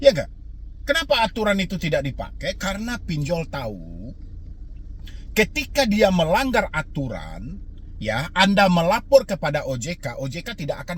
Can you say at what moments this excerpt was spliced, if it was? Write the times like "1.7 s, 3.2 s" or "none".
none